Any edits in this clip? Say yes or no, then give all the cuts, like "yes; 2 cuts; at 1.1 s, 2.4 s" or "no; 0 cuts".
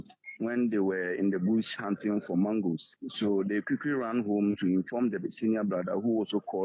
no; 0 cuts